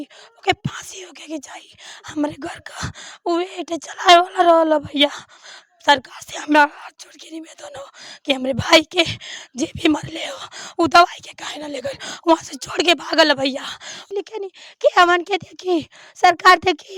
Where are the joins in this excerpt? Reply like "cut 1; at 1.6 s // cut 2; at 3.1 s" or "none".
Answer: cut 1; at 14.0 s